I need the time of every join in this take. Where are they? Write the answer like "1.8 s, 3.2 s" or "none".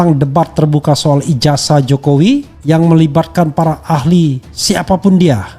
2.5 s, 4.5 s

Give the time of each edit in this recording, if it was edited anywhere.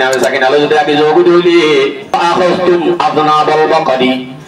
2.1 s

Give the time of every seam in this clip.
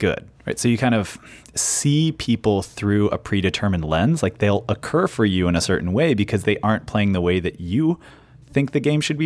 none

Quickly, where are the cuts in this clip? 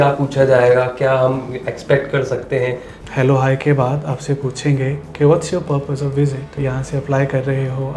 2.9 s, 6.6 s

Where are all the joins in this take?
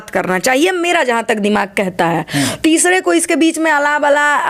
none

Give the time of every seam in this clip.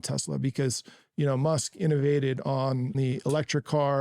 3.0 s

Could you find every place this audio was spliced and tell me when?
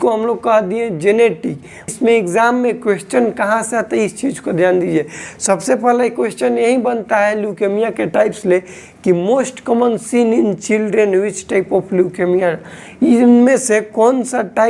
1.9 s

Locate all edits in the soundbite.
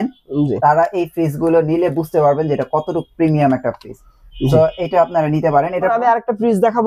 5.9 s

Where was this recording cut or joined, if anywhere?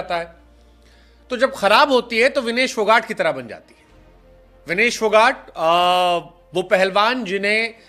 none

